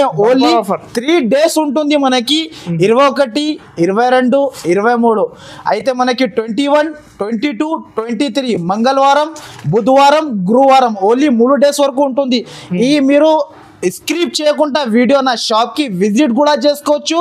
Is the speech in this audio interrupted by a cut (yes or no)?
no